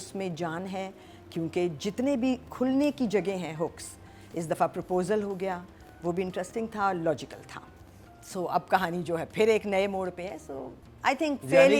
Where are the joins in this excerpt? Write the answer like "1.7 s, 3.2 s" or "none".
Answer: none